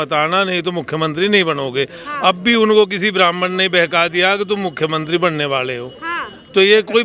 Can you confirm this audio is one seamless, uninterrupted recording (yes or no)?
yes